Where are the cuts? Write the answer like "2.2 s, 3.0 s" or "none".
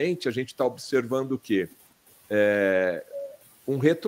none